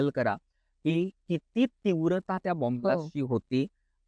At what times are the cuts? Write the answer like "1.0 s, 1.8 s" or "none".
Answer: none